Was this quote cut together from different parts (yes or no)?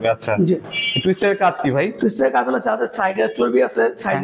no